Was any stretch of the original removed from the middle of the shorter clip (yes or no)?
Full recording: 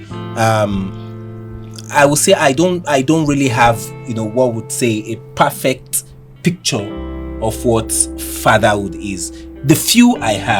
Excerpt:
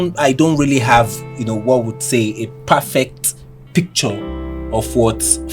no